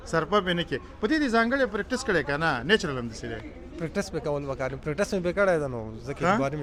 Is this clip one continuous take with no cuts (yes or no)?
yes